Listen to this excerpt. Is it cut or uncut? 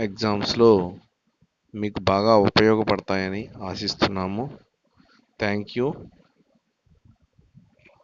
uncut